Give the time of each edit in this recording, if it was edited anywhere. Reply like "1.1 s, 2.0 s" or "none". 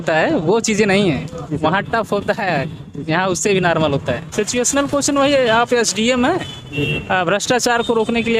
4.2 s